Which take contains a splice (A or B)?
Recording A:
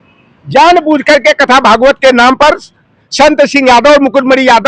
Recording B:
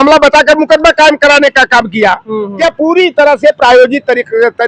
B